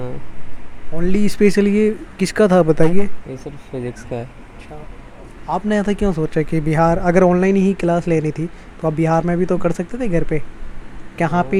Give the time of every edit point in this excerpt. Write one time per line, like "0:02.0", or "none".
none

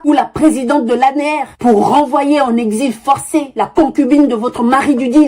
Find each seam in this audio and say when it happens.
none

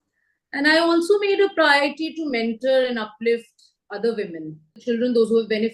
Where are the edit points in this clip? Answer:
0:04.8

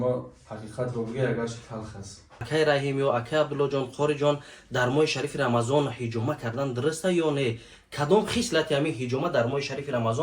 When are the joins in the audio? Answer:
0:02.5

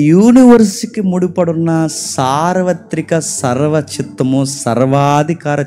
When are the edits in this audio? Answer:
none

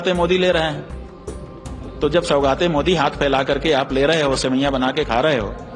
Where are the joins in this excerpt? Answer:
none

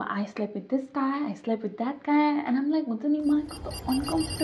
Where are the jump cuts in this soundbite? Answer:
none

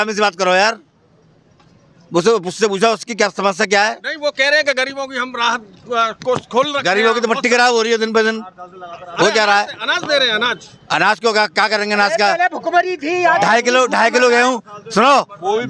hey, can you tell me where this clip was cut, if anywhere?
none

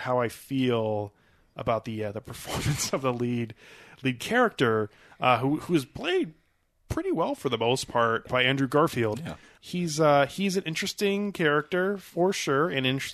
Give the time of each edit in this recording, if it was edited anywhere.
0:08.3
0:09.5

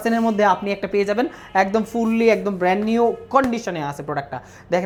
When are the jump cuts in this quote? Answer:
none

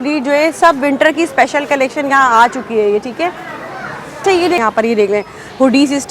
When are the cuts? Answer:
0:04.6

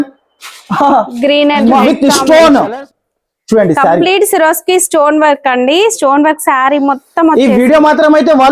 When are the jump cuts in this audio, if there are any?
0:01.8

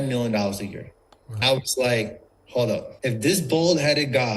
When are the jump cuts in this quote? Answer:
0:01.4
0:02.9

